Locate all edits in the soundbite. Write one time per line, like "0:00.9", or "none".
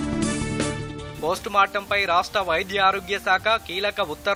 none